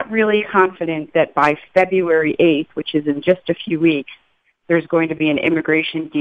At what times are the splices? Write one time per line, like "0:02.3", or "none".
none